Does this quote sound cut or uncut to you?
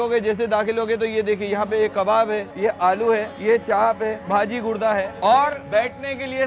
uncut